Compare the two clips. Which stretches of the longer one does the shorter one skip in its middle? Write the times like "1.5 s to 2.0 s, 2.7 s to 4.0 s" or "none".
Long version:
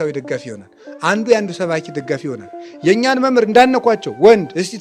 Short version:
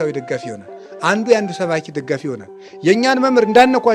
none